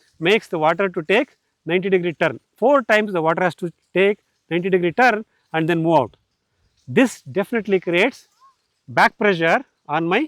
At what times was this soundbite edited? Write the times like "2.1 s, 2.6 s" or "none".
none